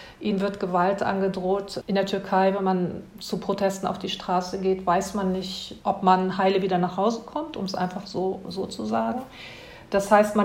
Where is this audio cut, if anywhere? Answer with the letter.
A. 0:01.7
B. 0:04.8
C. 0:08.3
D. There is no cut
A